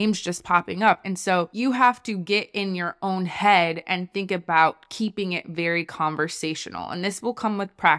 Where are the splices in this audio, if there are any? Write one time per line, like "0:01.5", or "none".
0:01.0